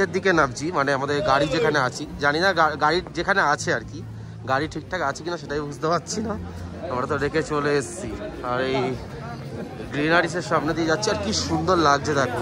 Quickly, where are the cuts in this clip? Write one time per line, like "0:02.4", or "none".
none